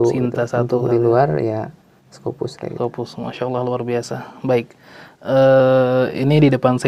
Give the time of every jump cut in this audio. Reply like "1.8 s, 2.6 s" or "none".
none